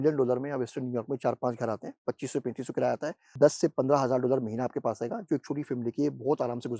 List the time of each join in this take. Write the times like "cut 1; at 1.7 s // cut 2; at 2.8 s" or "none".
cut 1; at 3.2 s